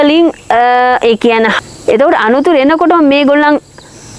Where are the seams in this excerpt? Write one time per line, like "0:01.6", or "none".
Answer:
0:01.6